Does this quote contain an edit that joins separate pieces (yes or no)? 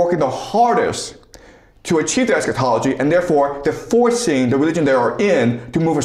no